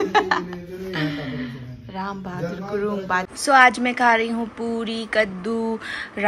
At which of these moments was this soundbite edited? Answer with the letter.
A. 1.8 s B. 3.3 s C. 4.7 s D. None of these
B